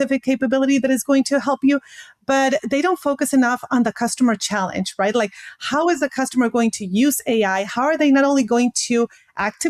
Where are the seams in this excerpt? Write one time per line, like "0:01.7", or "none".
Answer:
none